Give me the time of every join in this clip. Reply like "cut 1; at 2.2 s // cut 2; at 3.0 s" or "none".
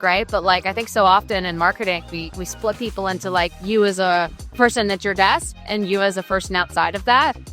none

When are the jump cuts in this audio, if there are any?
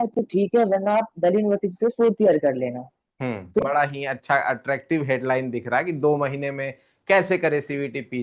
cut 1; at 3.6 s

